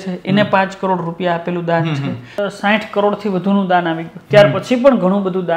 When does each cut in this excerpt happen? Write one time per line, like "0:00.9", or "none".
0:02.4